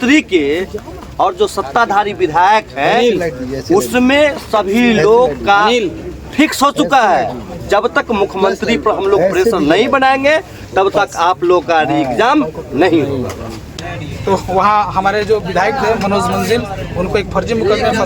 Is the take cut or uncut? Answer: cut